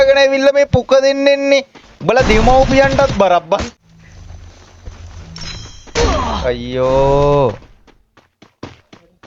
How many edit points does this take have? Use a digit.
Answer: 1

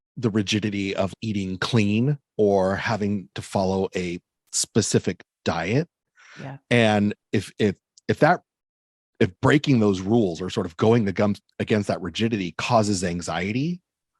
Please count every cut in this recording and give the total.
2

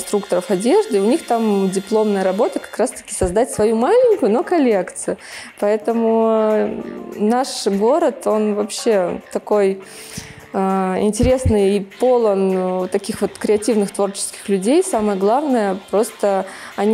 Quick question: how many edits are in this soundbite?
0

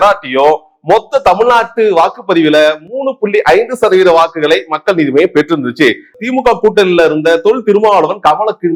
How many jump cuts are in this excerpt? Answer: 1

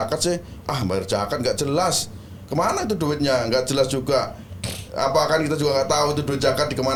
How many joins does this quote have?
0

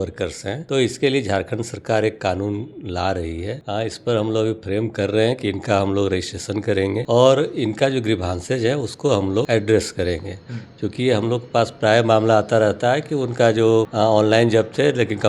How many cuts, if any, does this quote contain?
0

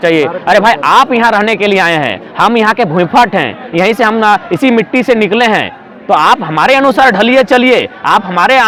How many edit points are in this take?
0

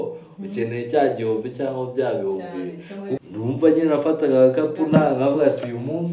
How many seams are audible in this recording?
1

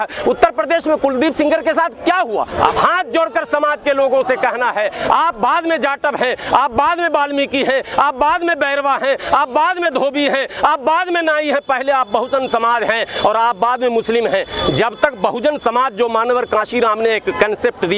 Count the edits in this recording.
1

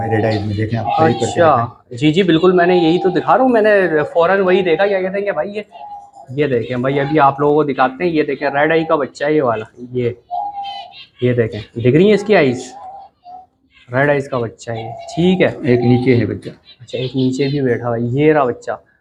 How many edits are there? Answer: 0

